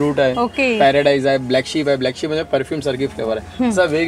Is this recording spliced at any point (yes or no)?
no